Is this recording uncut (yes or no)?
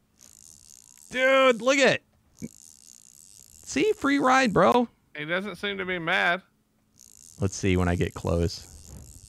yes